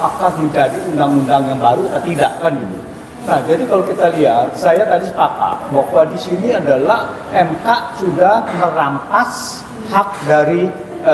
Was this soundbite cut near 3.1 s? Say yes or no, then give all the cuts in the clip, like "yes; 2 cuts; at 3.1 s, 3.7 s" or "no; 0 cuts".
no; 0 cuts